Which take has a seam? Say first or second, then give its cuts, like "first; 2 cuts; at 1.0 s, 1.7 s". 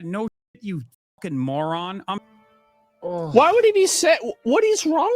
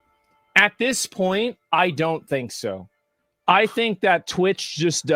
first; 1 cut; at 2.2 s